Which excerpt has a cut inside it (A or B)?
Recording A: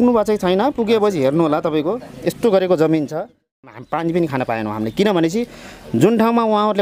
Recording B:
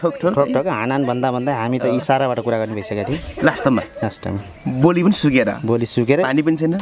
A